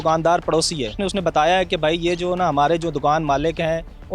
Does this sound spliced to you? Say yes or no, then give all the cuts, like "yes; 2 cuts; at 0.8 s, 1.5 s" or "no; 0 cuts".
yes; 1 cut; at 1.0 s